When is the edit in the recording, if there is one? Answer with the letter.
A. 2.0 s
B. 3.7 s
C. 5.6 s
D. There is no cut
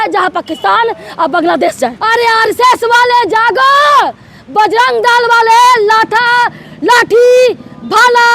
A